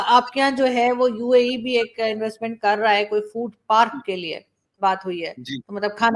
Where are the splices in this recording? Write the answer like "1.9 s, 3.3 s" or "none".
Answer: none